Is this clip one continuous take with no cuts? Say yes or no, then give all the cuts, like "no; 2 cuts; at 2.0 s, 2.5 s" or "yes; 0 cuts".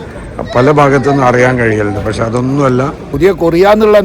no; 1 cut; at 3.1 s